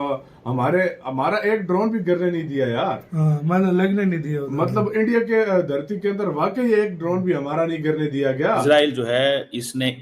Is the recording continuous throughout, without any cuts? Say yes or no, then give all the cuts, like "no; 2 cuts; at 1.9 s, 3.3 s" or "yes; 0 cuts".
no; 1 cut; at 8.6 s